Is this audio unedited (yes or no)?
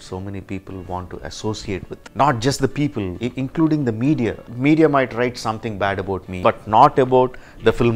no